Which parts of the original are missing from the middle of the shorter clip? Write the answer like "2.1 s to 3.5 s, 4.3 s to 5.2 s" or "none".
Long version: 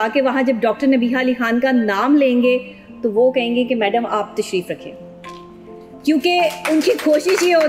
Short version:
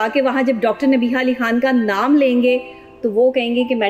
none